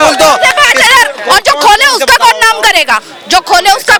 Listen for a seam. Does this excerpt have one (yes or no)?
no